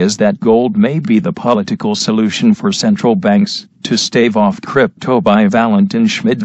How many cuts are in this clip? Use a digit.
1